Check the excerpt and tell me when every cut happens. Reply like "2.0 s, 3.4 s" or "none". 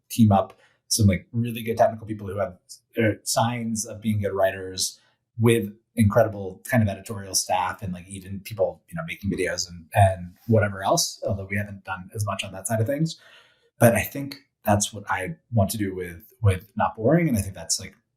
none